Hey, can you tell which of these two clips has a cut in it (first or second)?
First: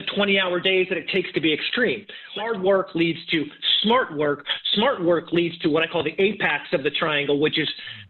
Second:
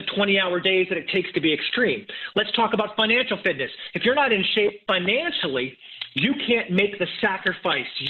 first